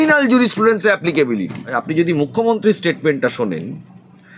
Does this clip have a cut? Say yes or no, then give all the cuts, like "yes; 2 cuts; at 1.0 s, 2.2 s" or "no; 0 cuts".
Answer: yes; 1 cut; at 1.7 s